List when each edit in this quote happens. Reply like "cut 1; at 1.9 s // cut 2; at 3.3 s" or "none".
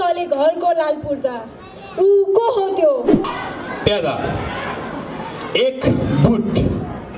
cut 1; at 3.3 s